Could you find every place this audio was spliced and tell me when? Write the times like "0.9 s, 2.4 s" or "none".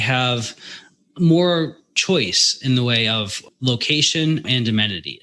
1.9 s, 3.4 s, 4.4 s